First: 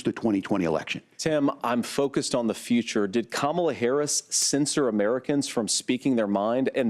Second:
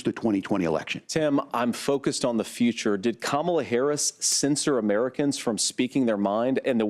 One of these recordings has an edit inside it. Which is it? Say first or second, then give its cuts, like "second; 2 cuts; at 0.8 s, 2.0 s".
second; 1 cut; at 1.0 s